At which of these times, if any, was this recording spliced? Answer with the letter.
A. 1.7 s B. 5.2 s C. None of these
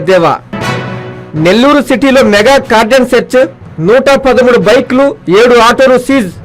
C